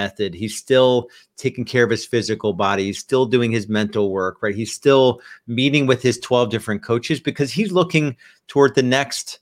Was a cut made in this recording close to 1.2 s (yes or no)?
no